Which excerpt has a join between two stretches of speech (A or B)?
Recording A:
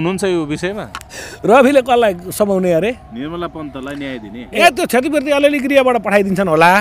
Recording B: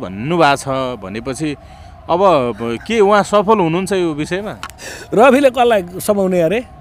A